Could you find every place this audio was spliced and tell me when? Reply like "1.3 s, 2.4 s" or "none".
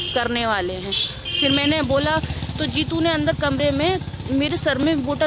none